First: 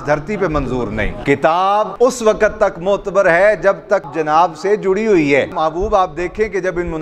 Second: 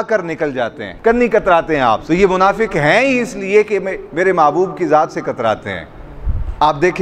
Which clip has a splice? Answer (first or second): first